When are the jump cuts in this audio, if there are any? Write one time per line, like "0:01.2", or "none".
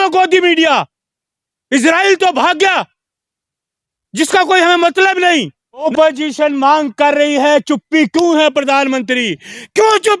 0:05.9